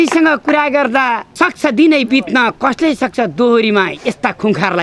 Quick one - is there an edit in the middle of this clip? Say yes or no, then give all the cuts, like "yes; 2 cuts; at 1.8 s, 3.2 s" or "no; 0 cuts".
no; 0 cuts